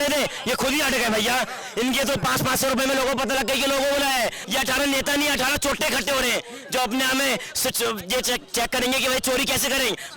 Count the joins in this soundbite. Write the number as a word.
one